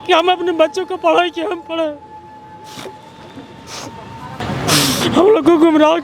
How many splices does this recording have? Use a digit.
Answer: 1